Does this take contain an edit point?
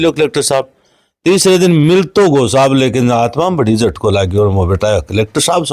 no; 0 cuts

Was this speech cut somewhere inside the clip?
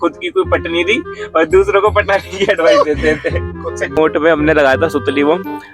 yes; 1 cut; at 4.0 s

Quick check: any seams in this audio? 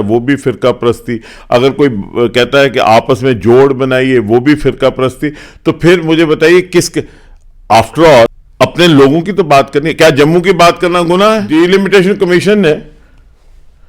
yes; 2 cuts; at 8.4 s, 11.5 s

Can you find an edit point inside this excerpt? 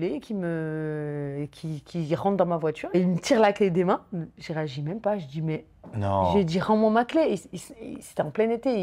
no; 0 cuts

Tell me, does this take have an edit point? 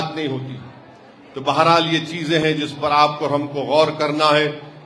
no; 0 cuts

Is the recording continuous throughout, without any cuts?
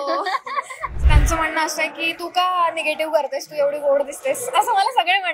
no; 1 cut; at 1.0 s

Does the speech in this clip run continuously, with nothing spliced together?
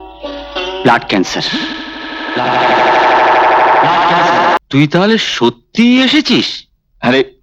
no; 1 cut; at 4.6 s

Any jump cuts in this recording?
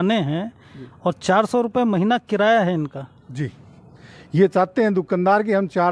no; 0 cuts

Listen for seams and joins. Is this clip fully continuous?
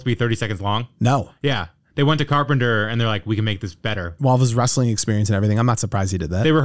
no; 1 cut; at 4.1 s

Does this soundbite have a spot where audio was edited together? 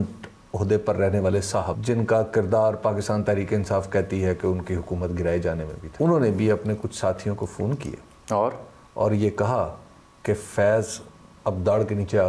yes; 2 cuts; at 1.8 s, 5.8 s

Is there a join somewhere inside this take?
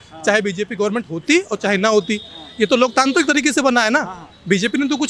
no; 0 cuts

